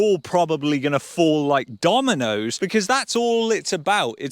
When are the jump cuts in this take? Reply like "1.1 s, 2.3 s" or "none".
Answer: 2.5 s